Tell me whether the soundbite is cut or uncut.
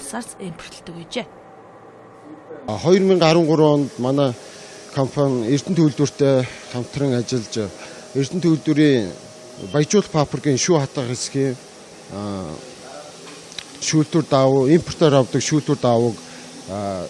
uncut